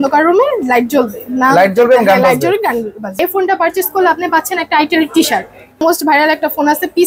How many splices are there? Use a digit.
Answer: 2